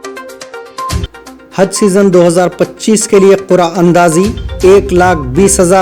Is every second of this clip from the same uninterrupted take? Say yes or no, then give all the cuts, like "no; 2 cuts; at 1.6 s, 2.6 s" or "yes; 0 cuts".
no; 1 cut; at 1.1 s